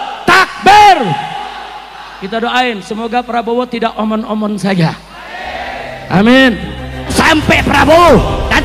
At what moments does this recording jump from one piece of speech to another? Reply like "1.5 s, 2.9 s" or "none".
7.1 s